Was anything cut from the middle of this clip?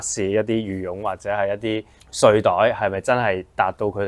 no; 0 cuts

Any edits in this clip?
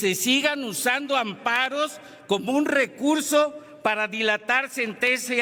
no; 0 cuts

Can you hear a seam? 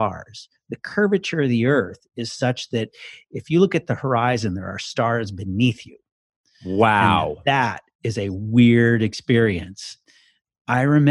yes; 1 cut; at 10.0 s

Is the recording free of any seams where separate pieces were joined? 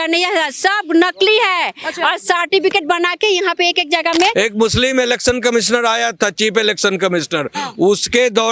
no; 1 cut; at 4.3 s

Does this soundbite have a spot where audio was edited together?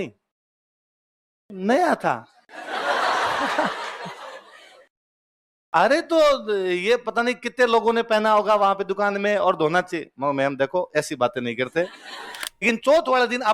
yes; 1 cut; at 12.5 s

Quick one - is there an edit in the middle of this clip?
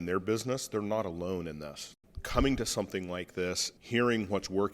yes; 2 cuts; at 1.8 s, 3.7 s

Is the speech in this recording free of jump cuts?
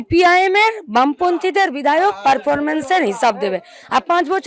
yes; 0 cuts

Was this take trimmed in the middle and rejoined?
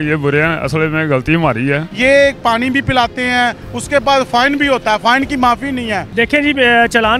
yes; 2 cuts; at 1.9 s, 6.0 s

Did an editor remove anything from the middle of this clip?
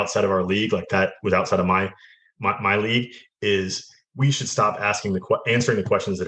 no; 0 cuts

